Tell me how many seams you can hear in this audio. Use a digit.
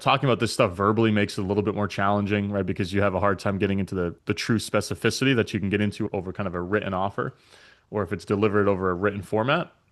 1